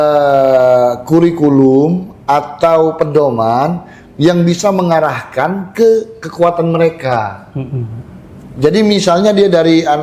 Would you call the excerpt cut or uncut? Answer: uncut